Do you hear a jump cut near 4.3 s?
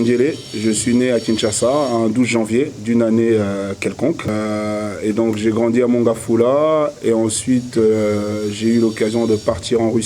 yes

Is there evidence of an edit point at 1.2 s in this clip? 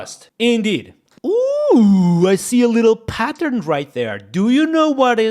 yes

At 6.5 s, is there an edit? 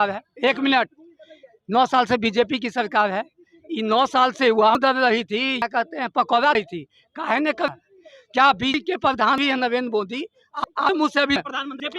no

